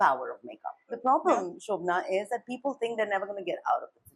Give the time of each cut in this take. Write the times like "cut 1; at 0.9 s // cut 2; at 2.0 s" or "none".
cut 1; at 1.0 s